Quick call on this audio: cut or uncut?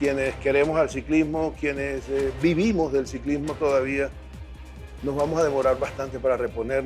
uncut